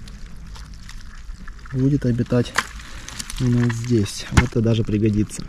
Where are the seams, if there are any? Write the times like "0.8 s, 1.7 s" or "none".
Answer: 4.5 s